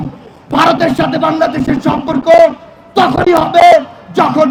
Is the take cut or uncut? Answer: uncut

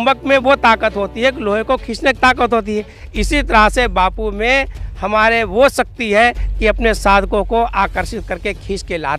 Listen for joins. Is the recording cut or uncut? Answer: uncut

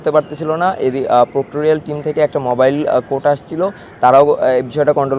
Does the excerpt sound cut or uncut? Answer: uncut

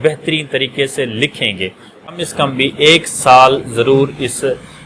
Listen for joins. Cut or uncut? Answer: cut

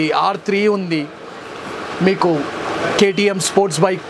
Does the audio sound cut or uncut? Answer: uncut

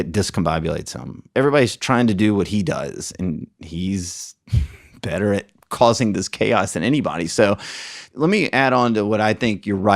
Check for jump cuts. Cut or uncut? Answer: cut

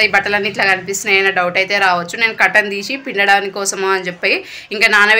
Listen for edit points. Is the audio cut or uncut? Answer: uncut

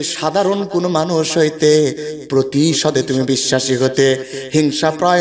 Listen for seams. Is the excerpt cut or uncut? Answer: uncut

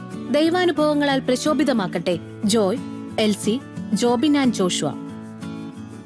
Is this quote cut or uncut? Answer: cut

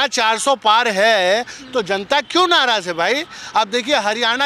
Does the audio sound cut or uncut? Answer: uncut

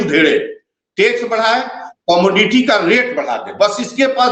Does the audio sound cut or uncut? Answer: uncut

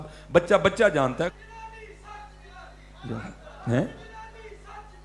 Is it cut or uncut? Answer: cut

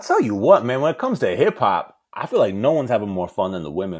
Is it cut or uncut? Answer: uncut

